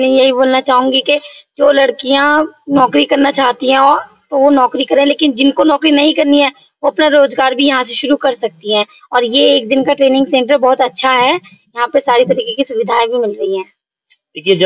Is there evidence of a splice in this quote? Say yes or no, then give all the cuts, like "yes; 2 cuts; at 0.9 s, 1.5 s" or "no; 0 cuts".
no; 0 cuts